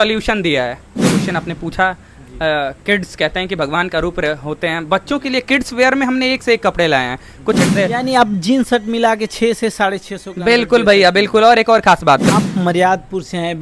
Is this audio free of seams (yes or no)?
no